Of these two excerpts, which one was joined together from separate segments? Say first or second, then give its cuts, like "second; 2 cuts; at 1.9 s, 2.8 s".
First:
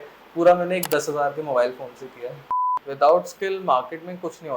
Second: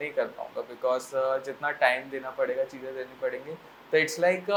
first; 1 cut; at 2.7 s